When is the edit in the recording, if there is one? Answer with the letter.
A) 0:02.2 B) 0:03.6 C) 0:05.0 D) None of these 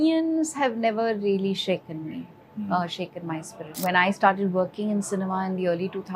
B